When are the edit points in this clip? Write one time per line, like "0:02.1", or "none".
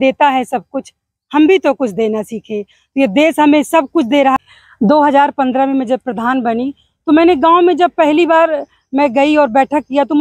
0:04.4